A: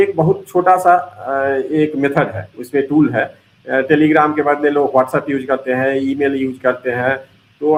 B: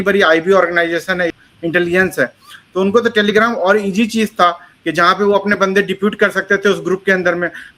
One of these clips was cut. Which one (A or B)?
B